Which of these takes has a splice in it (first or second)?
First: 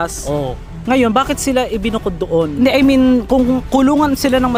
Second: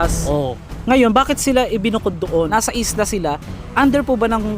second